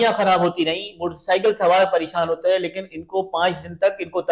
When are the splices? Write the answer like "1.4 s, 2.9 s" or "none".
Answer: none